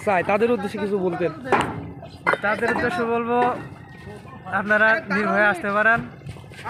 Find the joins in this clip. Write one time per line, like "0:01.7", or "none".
none